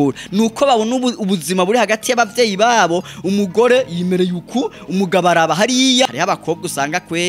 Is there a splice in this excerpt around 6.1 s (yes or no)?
yes